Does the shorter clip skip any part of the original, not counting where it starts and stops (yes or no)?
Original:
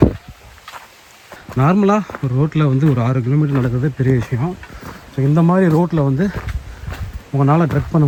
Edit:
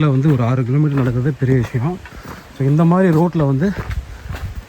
no